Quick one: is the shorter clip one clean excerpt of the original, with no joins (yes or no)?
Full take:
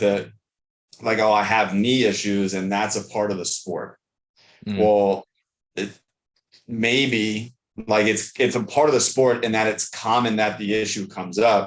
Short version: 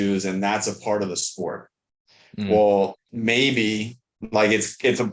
no